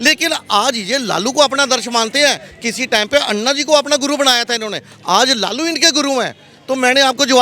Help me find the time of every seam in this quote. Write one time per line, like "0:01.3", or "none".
none